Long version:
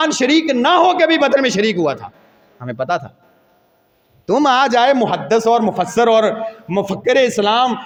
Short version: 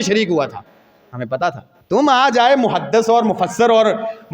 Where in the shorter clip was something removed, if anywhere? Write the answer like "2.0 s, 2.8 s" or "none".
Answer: 1.7 s